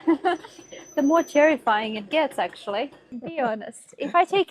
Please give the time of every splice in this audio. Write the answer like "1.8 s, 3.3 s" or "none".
3.2 s